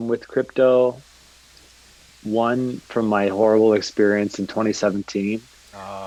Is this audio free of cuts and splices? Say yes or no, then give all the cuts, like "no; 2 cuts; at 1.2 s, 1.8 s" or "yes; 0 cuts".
yes; 0 cuts